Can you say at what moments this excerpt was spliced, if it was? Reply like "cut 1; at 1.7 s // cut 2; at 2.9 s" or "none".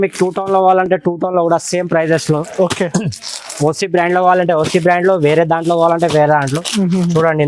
none